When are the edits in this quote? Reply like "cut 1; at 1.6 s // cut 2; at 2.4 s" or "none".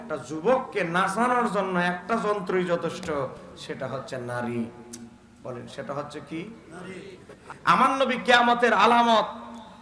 cut 1; at 7.3 s